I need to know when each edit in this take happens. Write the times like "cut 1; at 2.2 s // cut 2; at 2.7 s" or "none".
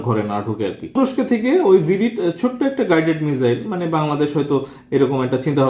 cut 1; at 1.0 s